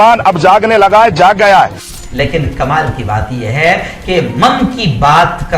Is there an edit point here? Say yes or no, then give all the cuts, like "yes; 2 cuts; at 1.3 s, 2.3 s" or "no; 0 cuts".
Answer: yes; 1 cut; at 1.9 s